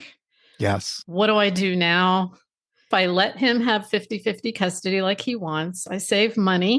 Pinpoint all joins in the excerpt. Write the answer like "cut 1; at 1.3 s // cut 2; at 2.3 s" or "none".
cut 1; at 0.9 s // cut 2; at 2.9 s